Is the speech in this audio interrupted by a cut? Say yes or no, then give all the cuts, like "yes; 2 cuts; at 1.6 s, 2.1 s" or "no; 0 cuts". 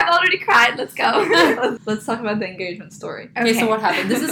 yes; 1 cut; at 1.8 s